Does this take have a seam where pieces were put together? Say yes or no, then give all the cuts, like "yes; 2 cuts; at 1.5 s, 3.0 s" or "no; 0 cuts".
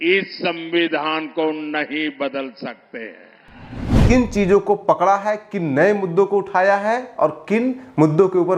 yes; 1 cut; at 3.9 s